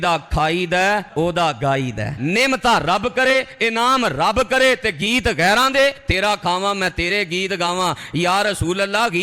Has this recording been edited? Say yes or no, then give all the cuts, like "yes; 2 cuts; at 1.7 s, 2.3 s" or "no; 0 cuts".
yes; 1 cut; at 2.2 s